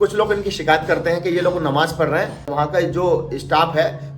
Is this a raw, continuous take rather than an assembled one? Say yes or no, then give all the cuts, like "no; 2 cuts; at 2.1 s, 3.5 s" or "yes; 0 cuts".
no; 1 cut; at 2.5 s